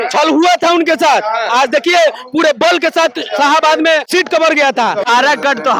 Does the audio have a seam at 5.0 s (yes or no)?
yes